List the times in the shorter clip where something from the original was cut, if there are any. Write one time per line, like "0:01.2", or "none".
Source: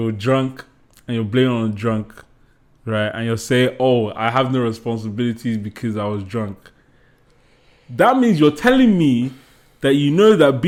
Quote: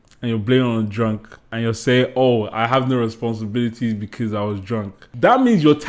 0:01.5
0:05.0